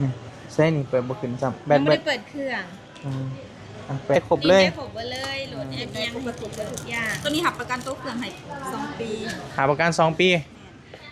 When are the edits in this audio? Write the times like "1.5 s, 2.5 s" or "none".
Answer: 4.2 s